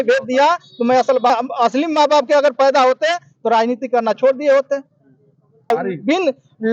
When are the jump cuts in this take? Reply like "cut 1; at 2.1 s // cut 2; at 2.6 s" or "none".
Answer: cut 1; at 1.3 s // cut 2; at 5.7 s

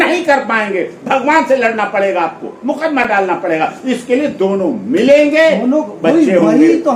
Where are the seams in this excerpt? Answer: none

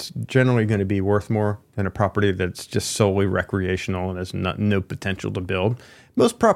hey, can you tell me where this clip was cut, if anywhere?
none

